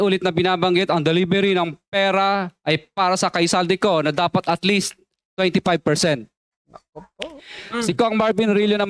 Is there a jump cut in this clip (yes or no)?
no